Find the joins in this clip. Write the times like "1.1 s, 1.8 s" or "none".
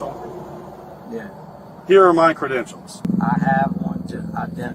2.9 s